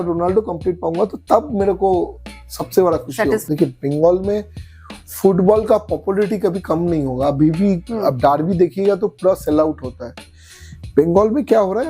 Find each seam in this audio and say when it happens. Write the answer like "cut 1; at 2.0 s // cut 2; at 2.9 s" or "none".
cut 1; at 3.4 s